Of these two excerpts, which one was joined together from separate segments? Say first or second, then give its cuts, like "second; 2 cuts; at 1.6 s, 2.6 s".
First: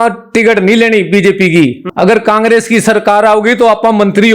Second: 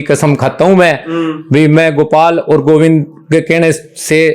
first; 1 cut; at 1.8 s